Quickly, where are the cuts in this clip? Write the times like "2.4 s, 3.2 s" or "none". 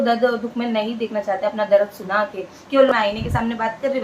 2.9 s